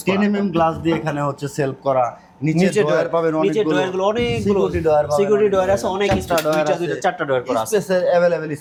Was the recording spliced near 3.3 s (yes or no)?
no